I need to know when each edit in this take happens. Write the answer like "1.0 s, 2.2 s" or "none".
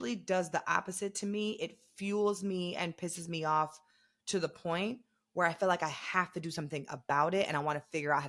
none